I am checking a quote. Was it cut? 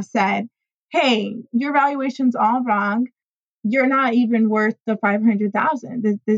yes; 1 cut; at 3.5 s

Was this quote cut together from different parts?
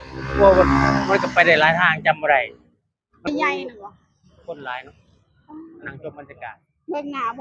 yes; 1 cut; at 3.3 s

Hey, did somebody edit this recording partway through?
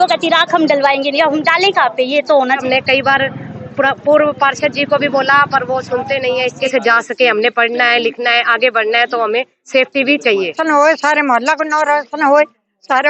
yes; 3 cuts; at 2.6 s, 6.6 s, 10.6 s

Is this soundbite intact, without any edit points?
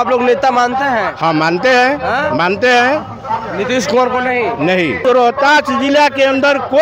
no; 1 cut; at 5.0 s

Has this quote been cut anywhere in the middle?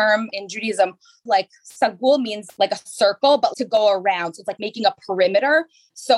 yes; 1 cut; at 1.3 s

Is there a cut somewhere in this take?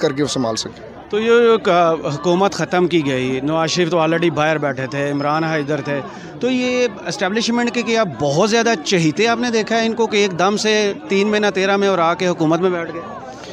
no; 0 cuts

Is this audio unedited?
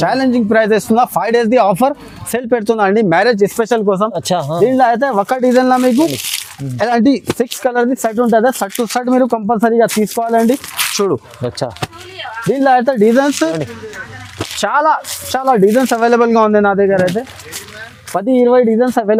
yes; 0 cuts

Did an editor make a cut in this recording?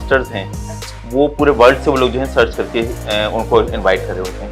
no; 0 cuts

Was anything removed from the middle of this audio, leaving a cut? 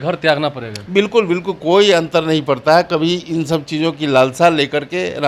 no; 0 cuts

